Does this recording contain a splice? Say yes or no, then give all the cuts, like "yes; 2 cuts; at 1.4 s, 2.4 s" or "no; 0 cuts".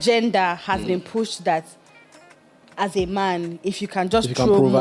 no; 0 cuts